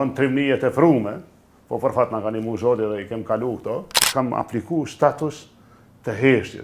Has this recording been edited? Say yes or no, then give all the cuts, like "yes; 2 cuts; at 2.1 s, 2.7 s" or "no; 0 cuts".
yes; 1 cut; at 4.0 s